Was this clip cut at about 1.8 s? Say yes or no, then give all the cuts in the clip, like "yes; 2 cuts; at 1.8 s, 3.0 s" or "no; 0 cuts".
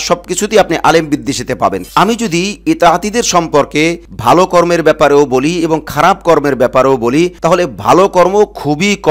yes; 1 cut; at 1.8 s